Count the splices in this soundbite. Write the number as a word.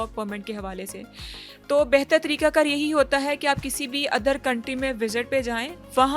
zero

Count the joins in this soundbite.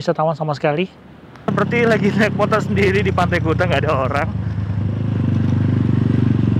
one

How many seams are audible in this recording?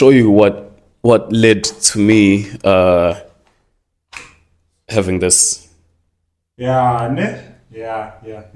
zero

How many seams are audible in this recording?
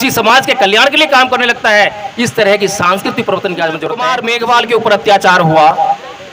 one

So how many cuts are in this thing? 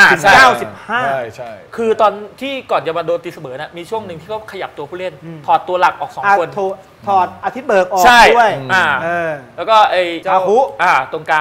two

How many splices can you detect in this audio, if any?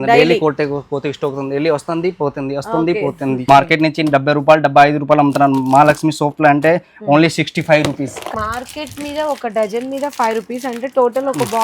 two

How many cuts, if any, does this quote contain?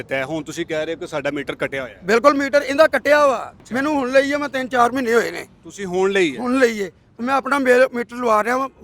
one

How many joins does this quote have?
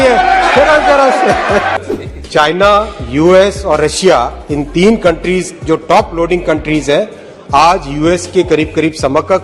one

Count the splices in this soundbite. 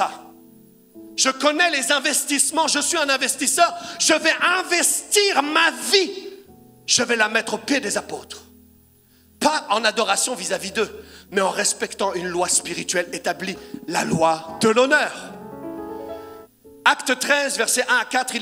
one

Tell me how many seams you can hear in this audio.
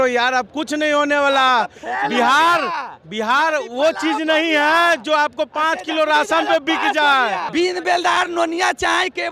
one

